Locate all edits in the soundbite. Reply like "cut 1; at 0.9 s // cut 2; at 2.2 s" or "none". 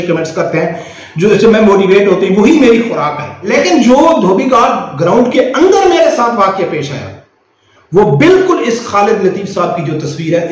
cut 1; at 3.5 s